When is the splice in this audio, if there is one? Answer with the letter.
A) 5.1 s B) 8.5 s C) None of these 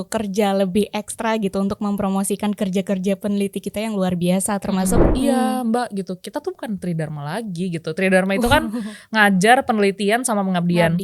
A